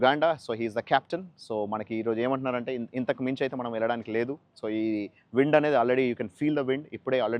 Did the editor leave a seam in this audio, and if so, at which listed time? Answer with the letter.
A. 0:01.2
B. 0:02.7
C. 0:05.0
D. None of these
D